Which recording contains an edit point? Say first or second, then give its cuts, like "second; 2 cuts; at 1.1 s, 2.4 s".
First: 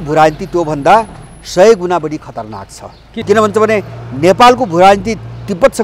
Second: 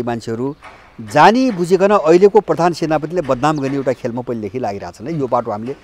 first; 1 cut; at 3.2 s